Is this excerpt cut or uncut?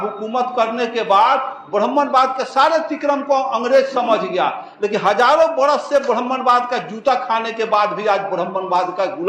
uncut